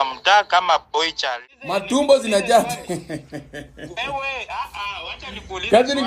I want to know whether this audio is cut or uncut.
cut